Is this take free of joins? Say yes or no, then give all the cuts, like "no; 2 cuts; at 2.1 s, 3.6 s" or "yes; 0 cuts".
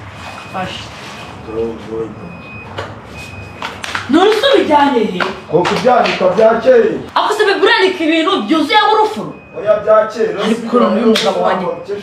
yes; 0 cuts